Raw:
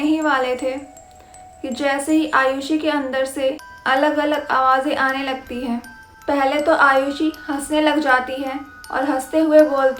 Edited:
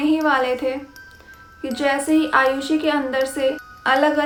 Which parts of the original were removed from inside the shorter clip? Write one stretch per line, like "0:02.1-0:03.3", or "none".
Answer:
none